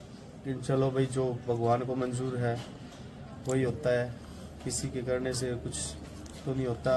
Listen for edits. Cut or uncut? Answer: uncut